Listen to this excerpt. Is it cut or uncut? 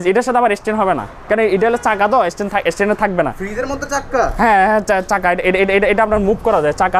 uncut